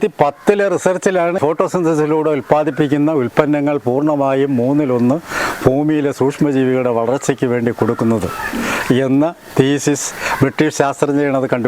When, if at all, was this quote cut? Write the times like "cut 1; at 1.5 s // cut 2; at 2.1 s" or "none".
cut 1; at 1.4 s